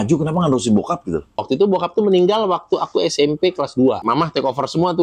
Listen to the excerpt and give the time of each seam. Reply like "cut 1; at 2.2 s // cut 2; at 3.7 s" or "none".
cut 1; at 1.4 s // cut 2; at 4.0 s